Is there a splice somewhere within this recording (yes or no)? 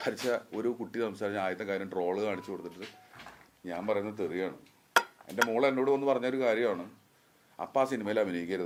no